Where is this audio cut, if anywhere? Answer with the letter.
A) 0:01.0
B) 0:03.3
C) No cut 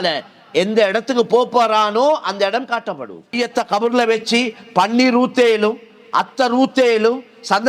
B